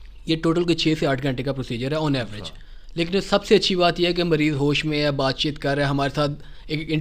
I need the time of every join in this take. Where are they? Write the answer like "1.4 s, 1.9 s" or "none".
none